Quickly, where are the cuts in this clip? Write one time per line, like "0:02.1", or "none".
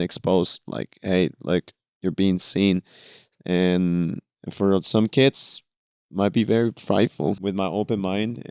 0:07.4